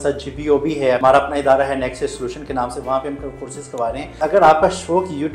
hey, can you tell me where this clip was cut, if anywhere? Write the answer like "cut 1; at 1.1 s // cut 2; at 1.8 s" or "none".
cut 1; at 1.0 s // cut 2; at 4.2 s